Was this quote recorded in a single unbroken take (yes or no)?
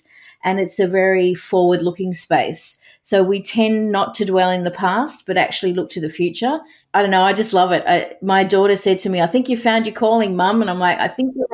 no